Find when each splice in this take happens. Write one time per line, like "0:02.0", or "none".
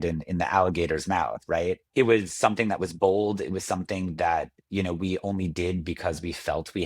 0:01.8